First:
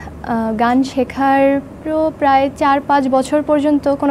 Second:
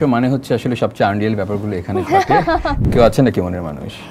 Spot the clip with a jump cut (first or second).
second